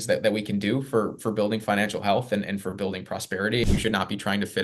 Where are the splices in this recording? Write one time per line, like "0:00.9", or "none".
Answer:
0:03.6